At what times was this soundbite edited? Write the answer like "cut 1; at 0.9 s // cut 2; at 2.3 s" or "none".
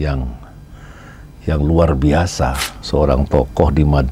cut 1; at 2.7 s